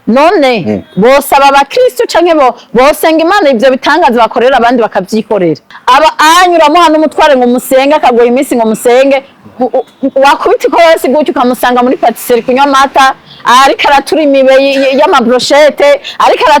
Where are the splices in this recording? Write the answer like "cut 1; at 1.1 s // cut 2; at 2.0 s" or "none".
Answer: cut 1; at 5.7 s